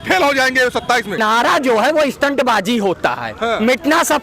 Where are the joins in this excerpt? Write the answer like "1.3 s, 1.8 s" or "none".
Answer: 1.2 s